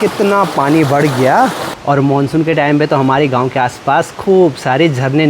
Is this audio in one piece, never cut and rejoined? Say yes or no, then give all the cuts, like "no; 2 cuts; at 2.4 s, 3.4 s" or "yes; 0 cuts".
no; 1 cut; at 1.7 s